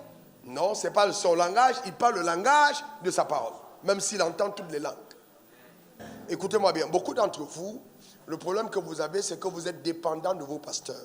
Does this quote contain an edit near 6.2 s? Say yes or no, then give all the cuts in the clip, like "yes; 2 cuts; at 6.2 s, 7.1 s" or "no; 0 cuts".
yes; 1 cut; at 6.2 s